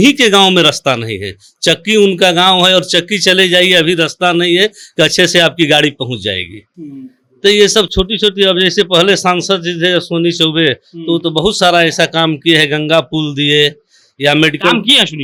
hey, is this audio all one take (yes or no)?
yes